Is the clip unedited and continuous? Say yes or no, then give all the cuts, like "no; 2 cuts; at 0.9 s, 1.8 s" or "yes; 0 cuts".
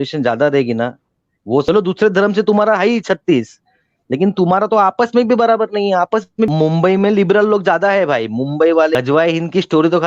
no; 3 cuts; at 1.6 s, 6.5 s, 8.9 s